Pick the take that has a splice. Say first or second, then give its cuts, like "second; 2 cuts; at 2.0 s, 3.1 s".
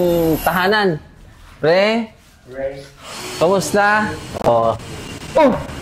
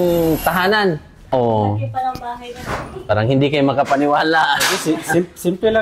second; 1 cut; at 1.1 s